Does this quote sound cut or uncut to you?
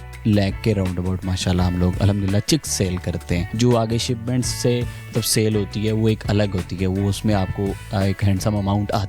cut